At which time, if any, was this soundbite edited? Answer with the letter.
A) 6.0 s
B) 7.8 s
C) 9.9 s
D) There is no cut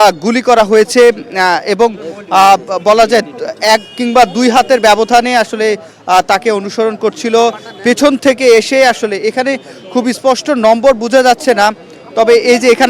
D